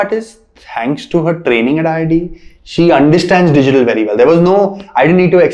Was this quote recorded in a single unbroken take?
yes; 0 cuts

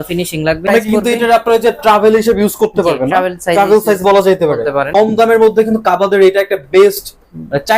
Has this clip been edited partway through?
yes; 2 cuts; at 0.7 s, 4.9 s

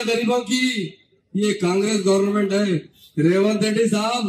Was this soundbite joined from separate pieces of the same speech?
no; 0 cuts

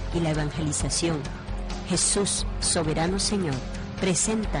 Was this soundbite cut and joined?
no; 0 cuts

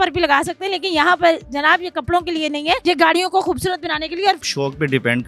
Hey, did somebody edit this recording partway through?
yes; 2 cuts; at 2.8 s, 4.4 s

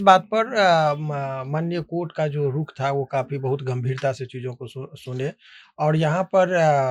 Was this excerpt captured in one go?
yes; 0 cuts

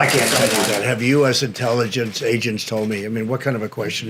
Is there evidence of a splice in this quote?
no; 0 cuts

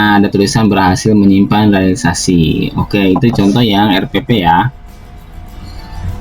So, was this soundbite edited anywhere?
yes; 1 cut; at 5.3 s

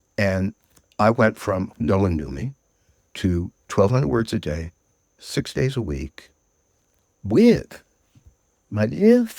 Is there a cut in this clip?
yes; 1 cut; at 1.7 s

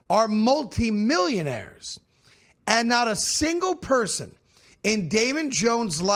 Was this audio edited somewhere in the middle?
no; 0 cuts

